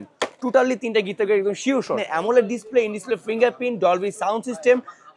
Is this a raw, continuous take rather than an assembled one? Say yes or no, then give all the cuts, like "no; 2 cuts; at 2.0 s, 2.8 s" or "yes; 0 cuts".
no; 1 cut; at 2.0 s